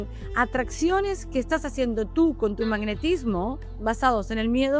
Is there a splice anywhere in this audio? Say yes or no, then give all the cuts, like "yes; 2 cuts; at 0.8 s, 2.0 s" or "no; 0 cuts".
yes; 1 cut; at 3.7 s